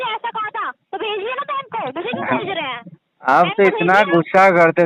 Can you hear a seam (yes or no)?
no